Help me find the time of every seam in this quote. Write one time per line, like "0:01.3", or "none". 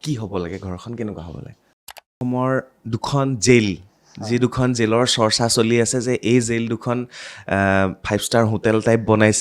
0:02.2